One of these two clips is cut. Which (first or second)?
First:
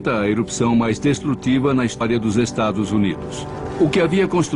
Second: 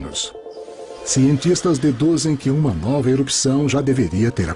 second